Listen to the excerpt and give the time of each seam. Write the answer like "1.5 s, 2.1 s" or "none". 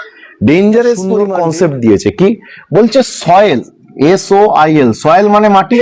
1.3 s